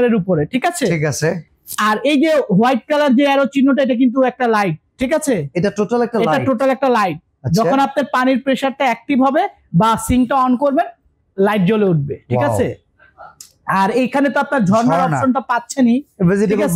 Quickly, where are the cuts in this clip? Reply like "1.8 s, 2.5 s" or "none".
none

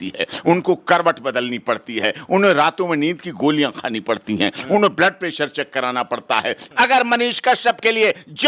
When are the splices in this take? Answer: 6.6 s

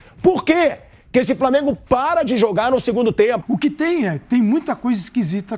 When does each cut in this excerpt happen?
3.4 s

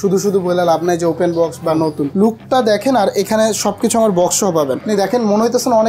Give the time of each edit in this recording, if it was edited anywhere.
2.1 s, 4.8 s

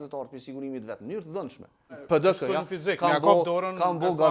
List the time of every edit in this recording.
2.0 s

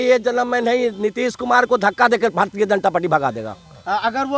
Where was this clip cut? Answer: none

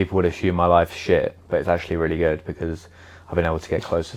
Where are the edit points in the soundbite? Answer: none

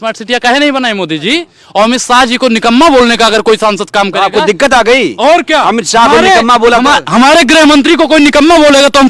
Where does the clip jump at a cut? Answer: 1.6 s

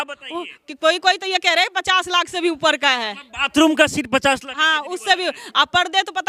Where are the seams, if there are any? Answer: none

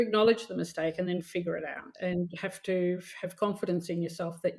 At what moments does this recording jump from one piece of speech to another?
1.8 s

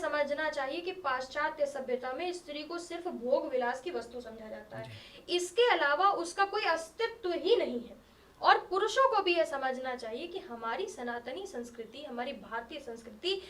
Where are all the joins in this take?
none

